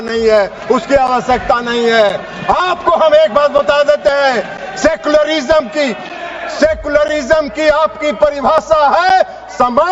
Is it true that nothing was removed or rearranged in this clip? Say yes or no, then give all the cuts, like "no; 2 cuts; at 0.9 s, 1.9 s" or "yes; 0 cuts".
yes; 0 cuts